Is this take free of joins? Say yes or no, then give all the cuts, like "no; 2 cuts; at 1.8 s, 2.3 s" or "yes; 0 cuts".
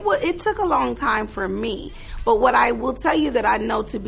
yes; 0 cuts